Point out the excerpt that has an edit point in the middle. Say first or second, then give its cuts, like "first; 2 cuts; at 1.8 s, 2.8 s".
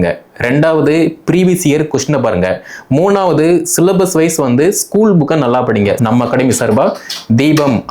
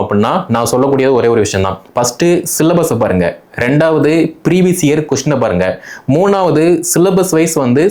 first; 1 cut; at 6.0 s